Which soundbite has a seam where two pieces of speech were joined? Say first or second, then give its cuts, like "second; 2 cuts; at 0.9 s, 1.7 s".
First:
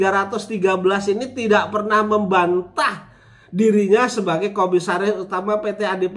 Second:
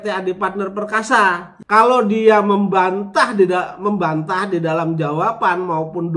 second; 1 cut; at 1.5 s